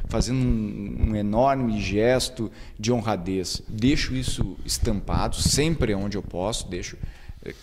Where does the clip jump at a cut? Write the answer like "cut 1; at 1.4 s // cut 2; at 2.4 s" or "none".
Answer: cut 1; at 3.7 s